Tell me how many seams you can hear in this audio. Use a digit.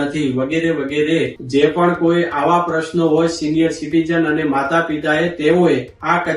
1